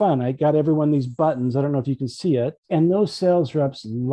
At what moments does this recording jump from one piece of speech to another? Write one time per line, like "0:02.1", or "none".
0:02.6